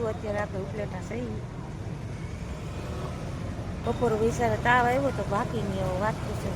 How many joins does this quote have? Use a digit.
1